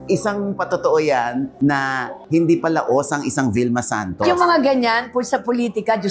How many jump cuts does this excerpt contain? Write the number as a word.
one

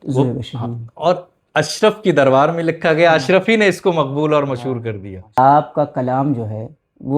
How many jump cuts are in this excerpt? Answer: one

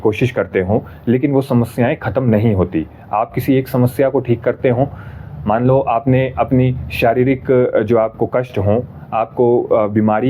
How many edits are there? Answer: zero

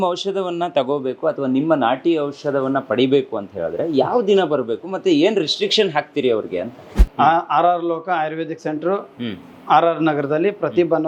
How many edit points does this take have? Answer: zero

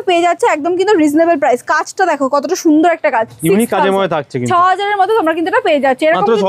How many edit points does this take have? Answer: zero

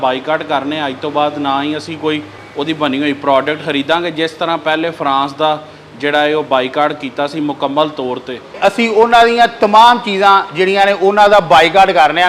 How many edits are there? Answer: two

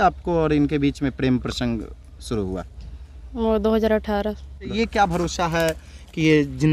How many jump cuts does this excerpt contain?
one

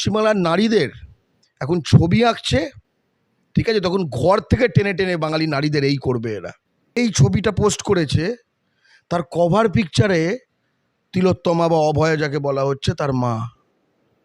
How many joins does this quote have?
one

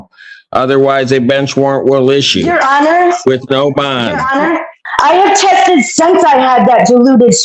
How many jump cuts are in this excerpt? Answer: one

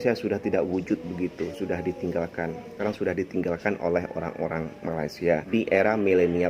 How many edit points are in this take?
two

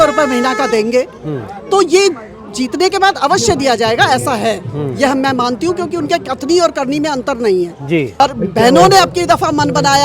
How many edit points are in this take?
one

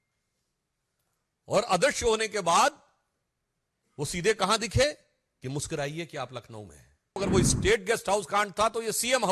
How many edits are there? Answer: one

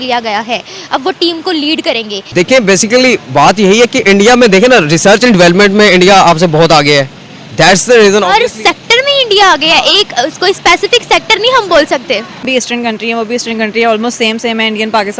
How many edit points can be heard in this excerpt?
two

